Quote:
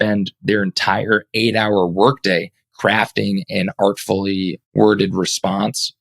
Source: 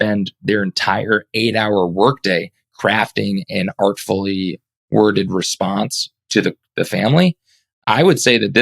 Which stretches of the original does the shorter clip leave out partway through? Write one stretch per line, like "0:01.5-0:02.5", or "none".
0:04.6-0:04.8